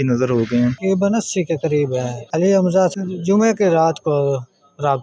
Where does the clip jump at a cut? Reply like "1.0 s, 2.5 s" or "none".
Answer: 0.8 s, 2.2 s, 2.9 s